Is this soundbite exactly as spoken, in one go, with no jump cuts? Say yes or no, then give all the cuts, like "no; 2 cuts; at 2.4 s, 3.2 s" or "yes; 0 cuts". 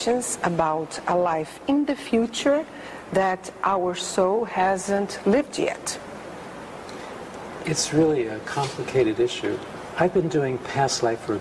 yes; 0 cuts